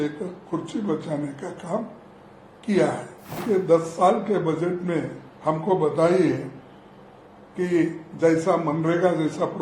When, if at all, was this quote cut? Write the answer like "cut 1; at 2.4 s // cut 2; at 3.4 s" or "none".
cut 1; at 3.3 s